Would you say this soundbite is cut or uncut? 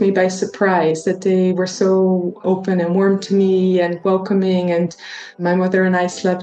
cut